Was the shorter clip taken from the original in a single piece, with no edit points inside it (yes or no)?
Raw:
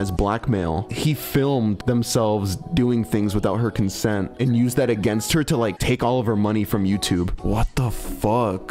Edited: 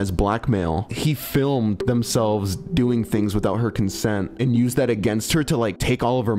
yes